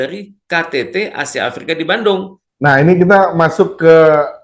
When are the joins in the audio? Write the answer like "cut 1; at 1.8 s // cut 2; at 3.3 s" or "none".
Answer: cut 1; at 2.4 s